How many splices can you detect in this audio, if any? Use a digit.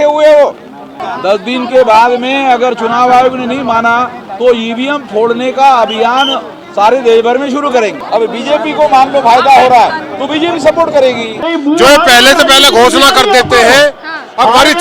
3